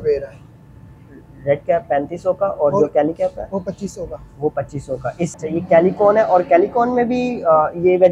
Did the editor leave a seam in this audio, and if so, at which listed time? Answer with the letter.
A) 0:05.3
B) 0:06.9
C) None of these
A